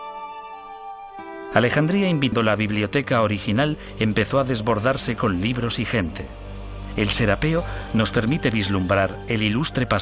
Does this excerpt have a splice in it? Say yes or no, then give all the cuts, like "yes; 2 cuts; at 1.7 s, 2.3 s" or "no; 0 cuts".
no; 0 cuts